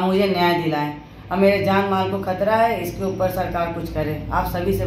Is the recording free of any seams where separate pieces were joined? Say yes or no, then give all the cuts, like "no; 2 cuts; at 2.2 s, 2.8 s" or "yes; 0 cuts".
yes; 0 cuts